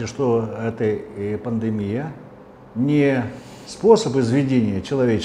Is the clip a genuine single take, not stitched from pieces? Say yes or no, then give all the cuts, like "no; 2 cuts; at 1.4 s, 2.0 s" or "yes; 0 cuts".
yes; 0 cuts